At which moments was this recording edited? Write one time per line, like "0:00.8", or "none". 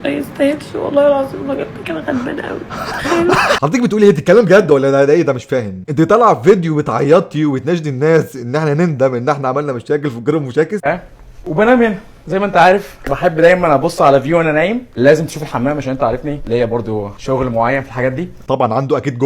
0:03.6
0:10.8